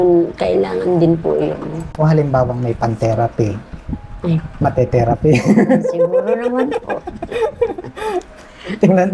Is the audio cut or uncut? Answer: cut